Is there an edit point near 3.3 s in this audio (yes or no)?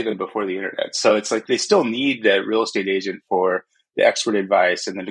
no